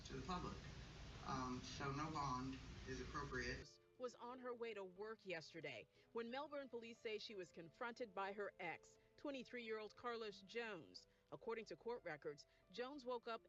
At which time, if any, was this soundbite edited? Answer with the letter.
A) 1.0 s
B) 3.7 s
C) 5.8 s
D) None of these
B